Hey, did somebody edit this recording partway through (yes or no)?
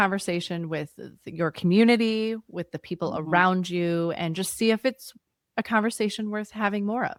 no